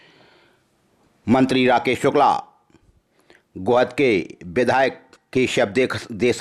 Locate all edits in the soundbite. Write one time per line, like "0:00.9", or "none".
none